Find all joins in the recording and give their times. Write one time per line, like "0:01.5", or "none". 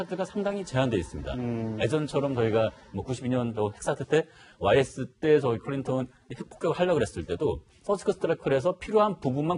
none